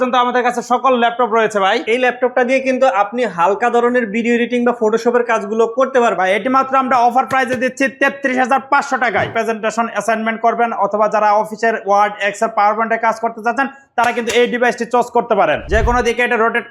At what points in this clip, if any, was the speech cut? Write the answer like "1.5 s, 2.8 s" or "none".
1.8 s, 6.1 s, 9.3 s, 15.6 s